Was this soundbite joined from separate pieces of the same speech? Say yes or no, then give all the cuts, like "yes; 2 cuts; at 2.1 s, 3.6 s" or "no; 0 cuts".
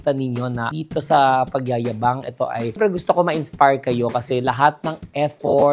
no; 0 cuts